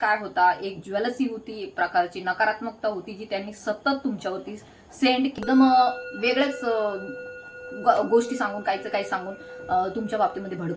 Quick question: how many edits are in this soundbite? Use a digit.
1